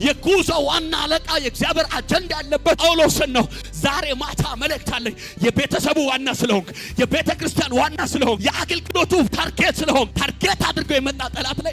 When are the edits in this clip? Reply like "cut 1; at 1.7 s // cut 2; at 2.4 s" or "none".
none